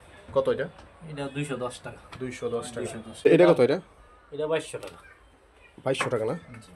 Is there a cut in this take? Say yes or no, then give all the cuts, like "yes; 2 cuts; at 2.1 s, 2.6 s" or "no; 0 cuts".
yes; 1 cut; at 3.2 s